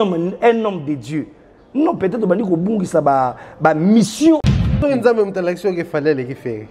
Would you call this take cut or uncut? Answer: cut